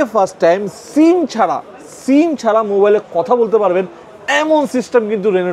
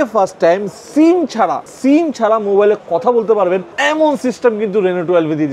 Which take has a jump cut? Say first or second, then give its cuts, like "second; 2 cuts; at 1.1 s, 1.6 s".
second; 2 cuts; at 1.7 s, 3.7 s